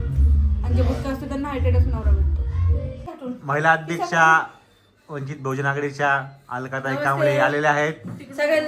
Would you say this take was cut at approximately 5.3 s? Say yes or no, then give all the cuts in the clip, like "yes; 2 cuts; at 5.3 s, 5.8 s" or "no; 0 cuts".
no; 1 cut; at 3.1 s